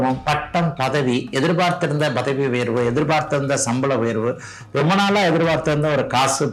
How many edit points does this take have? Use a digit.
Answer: 0